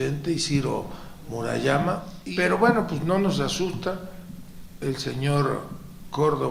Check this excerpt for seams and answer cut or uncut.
cut